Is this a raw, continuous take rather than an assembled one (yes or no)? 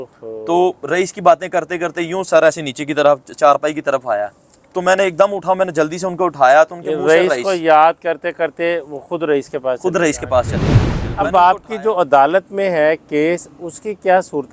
yes